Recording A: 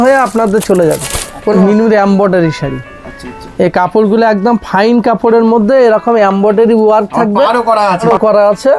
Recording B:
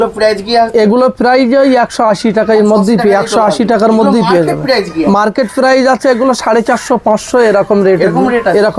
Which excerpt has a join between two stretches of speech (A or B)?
A